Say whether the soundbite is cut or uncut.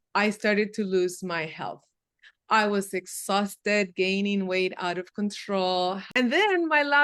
cut